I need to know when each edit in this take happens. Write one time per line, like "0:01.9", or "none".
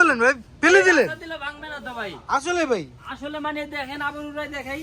none